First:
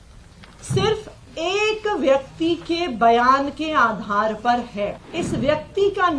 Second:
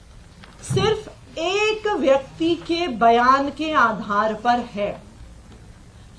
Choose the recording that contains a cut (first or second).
first